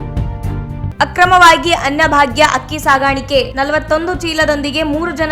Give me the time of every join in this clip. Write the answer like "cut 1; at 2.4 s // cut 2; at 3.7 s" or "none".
cut 1; at 0.9 s